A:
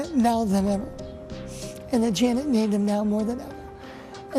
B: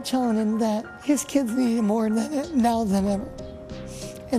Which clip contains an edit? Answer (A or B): B